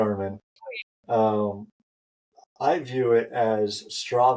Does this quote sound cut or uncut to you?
uncut